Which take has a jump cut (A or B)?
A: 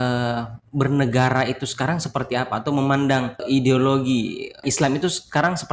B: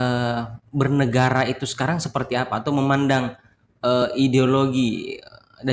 A